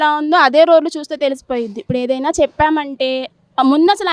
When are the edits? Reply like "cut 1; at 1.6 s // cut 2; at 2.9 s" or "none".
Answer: cut 1; at 1.8 s